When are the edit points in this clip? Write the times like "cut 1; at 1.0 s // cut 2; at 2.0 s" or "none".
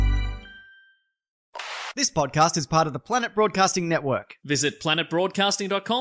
cut 1; at 1.5 s